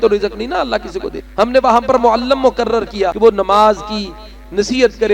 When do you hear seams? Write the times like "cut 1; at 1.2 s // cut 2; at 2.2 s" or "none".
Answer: cut 1; at 1.2 s // cut 2; at 3.1 s